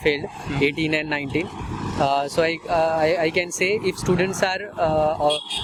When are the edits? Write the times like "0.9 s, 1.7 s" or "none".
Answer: none